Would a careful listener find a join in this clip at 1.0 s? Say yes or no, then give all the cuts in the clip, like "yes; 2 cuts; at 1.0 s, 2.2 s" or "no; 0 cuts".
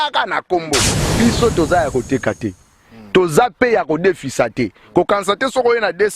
yes; 1 cut; at 1.0 s